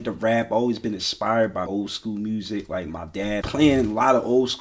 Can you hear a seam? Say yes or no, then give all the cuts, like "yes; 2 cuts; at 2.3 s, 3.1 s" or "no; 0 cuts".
yes; 2 cuts; at 1.7 s, 3.4 s